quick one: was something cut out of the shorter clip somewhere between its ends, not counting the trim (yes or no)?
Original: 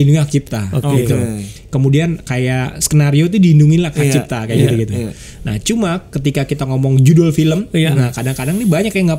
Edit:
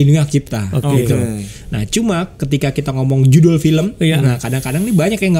yes